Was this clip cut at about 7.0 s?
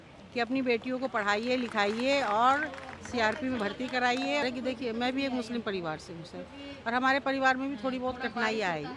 no; 1 cut; at 4.4 s

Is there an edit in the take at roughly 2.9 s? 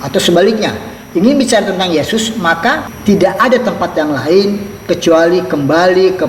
yes; 1 cut; at 2.9 s

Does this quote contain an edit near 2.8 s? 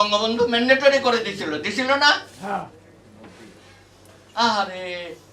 no; 0 cuts

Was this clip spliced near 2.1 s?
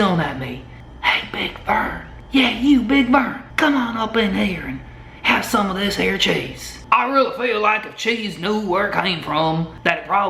yes; 2 cuts; at 2.1 s, 6.8 s

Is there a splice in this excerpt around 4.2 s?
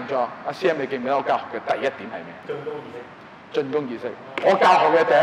no; 1 cut; at 2.4 s

